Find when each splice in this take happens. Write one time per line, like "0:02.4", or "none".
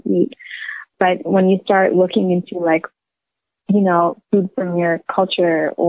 0:00.9